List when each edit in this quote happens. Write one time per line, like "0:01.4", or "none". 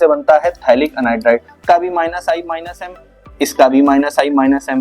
0:01.5